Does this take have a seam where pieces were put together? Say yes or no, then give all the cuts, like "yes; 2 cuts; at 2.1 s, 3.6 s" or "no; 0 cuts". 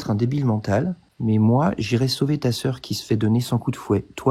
yes; 1 cut; at 1.1 s